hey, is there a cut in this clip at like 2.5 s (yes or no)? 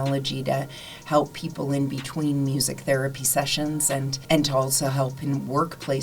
no